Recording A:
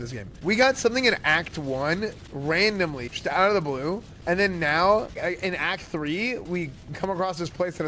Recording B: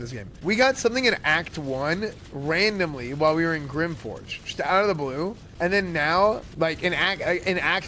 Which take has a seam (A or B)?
A